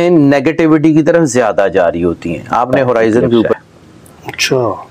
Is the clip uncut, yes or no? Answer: no